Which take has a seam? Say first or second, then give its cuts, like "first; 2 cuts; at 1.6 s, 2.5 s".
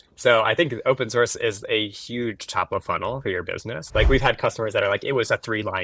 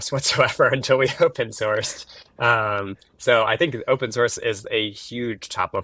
first; 1 cut; at 3.8 s